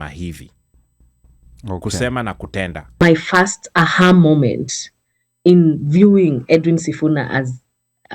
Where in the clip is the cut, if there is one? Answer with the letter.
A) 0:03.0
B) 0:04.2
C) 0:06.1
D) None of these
A